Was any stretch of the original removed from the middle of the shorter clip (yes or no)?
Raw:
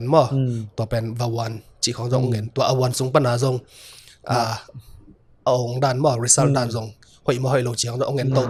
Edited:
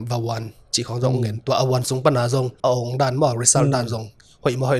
yes